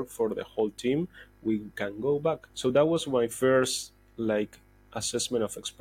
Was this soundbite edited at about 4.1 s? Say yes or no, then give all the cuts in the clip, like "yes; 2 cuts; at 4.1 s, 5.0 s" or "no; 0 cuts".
no; 1 cut; at 2.5 s